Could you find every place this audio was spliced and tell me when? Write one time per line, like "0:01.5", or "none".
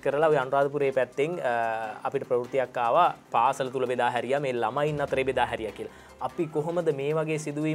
none